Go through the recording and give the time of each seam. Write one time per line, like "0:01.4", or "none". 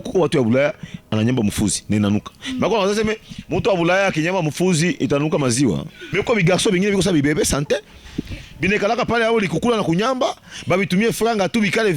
0:06.0